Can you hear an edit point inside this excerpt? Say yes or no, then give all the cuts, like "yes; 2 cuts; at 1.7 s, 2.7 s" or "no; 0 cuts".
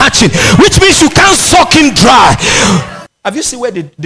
yes; 1 cut; at 3.0 s